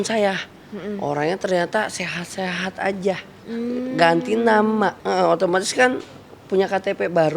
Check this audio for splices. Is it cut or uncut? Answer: cut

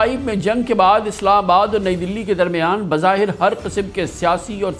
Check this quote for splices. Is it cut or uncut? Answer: uncut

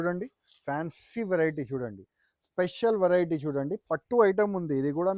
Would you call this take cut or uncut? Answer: uncut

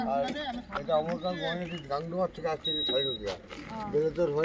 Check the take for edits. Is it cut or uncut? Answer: uncut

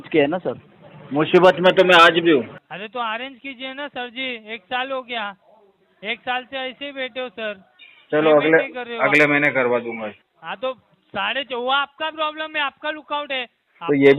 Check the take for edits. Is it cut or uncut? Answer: cut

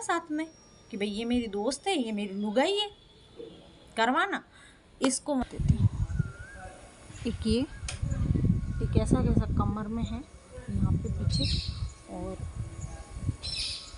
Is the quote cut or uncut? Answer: cut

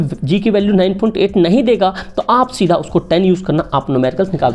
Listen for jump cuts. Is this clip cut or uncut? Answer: uncut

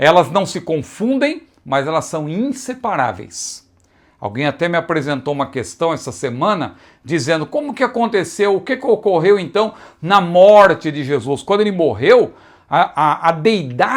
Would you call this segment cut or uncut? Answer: uncut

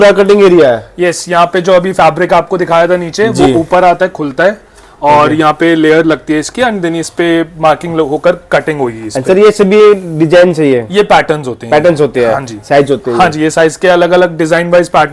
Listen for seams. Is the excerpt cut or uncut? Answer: uncut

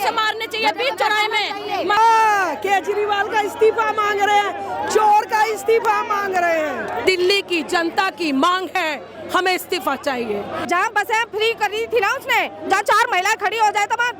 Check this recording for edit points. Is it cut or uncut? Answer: cut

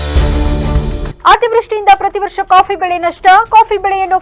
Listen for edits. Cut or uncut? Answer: uncut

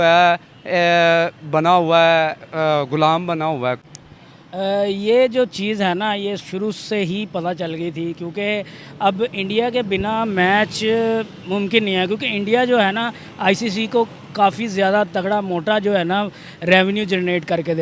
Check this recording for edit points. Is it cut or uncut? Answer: cut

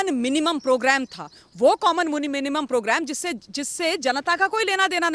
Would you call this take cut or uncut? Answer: uncut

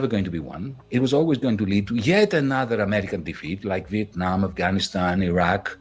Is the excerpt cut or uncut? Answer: uncut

